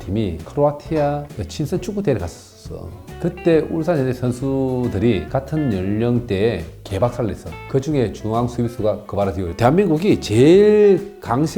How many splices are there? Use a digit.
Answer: 1